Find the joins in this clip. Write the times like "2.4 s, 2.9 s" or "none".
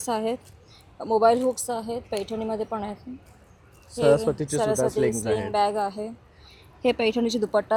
none